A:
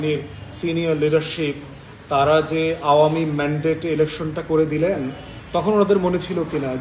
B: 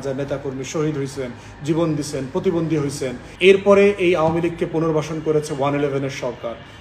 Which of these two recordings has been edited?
B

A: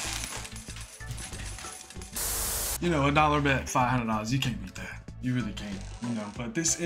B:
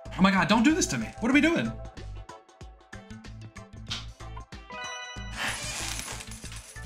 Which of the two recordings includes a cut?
A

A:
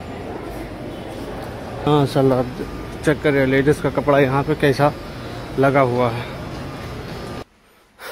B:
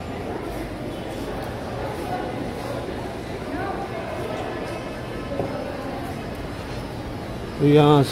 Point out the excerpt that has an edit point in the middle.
A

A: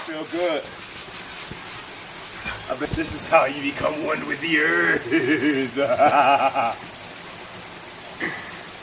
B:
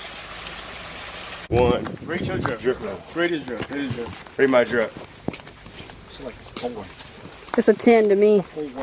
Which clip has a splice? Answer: B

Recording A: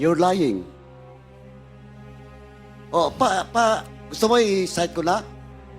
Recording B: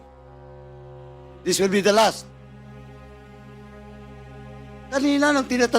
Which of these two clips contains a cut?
B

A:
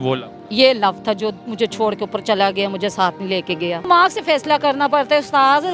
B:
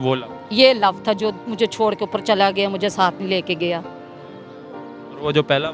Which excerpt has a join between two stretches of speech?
A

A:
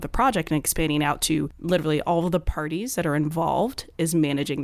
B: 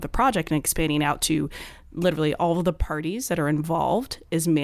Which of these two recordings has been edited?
A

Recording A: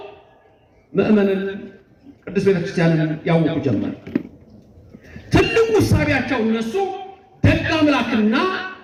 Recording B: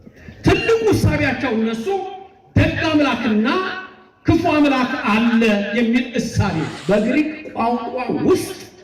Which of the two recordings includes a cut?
B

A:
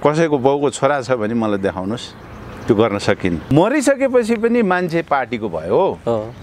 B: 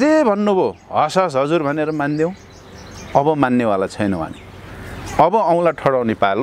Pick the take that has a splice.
A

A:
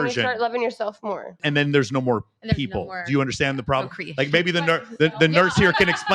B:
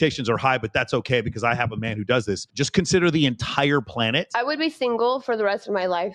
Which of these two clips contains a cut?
A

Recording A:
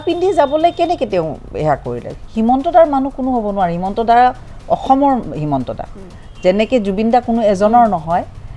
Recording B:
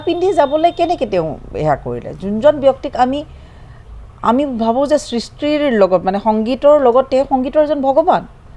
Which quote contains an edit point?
A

